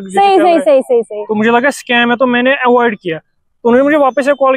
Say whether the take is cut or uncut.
uncut